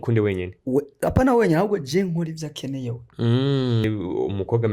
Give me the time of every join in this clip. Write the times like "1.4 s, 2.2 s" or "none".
3.8 s